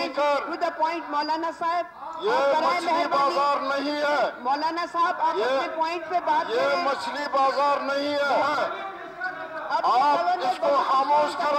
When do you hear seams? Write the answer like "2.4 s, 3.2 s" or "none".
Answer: 8.4 s